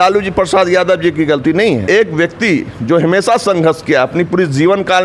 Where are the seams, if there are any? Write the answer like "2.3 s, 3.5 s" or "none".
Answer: 1.8 s